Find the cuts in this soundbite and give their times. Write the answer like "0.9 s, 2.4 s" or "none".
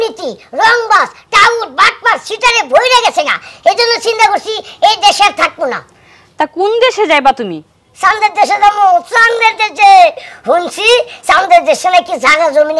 none